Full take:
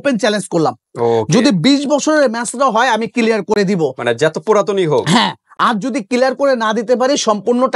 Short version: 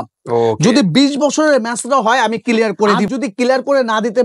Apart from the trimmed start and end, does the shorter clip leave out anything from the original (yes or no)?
yes